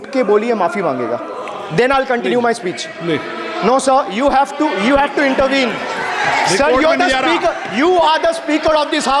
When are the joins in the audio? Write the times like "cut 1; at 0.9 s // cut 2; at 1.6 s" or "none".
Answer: none